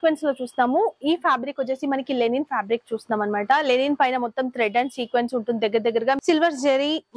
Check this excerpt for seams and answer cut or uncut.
cut